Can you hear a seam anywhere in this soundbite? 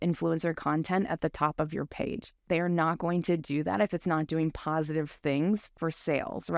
yes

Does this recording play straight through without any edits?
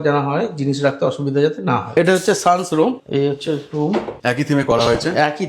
no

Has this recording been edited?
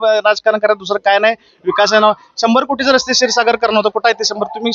no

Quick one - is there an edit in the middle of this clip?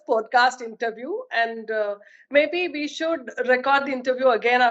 no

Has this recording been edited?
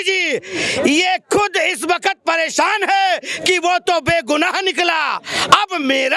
no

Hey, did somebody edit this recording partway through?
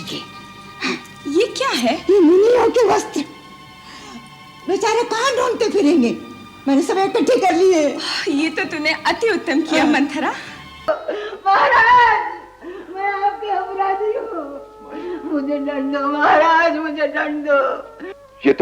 yes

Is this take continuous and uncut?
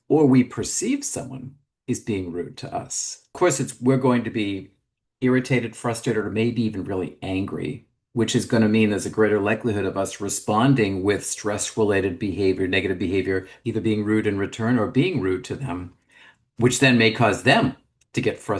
no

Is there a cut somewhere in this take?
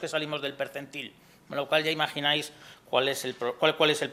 no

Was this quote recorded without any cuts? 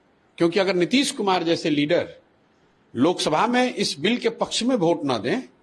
yes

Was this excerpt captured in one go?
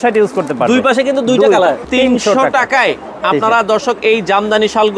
no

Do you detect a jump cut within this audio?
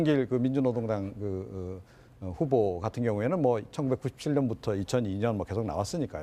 yes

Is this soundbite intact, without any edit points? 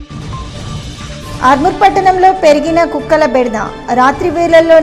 no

